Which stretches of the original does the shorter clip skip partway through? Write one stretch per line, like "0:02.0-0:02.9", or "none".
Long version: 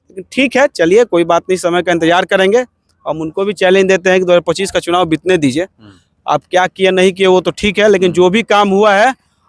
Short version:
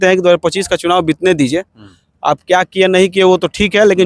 none